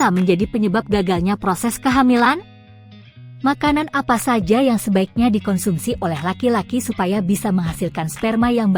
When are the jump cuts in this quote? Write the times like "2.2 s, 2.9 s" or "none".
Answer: 2.7 s